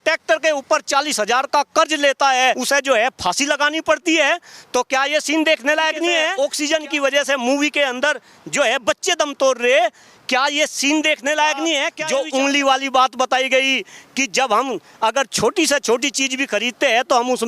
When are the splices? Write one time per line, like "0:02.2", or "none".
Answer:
0:02.6
0:06.3
0:11.9